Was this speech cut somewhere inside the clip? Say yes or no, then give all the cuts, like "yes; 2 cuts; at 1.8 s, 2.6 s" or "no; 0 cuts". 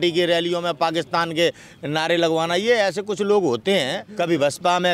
yes; 1 cut; at 4.0 s